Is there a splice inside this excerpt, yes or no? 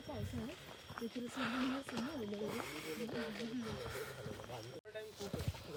no